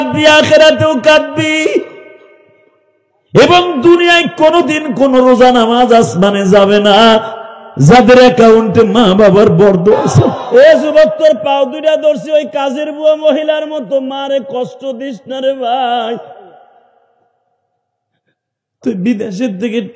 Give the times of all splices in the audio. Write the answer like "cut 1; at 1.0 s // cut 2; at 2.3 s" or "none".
cut 1; at 10.4 s